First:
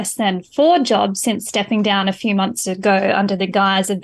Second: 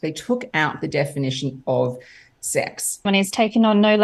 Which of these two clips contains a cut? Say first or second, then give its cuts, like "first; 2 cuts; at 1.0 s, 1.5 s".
second; 1 cut; at 3.1 s